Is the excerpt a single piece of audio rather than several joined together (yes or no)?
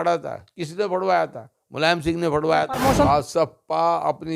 no